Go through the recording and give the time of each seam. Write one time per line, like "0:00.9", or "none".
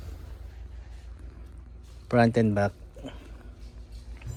none